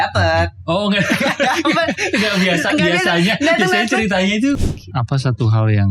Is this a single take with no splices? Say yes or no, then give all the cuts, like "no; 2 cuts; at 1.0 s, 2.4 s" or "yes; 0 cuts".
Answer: no; 1 cut; at 4.6 s